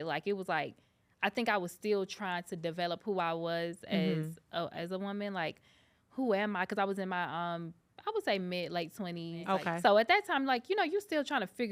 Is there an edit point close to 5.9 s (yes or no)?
no